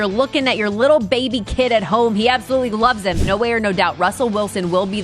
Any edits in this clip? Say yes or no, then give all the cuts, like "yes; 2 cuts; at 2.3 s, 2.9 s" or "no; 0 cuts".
yes; 1 cut; at 3.2 s